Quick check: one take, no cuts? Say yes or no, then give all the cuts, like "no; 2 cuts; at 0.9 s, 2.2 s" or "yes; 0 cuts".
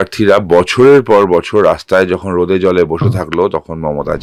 yes; 0 cuts